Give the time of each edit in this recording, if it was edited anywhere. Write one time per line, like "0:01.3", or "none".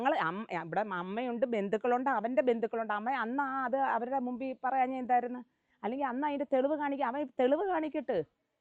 none